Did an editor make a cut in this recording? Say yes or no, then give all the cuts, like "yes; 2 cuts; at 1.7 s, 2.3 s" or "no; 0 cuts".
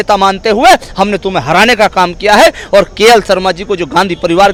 no; 0 cuts